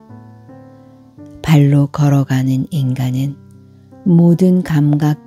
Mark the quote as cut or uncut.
cut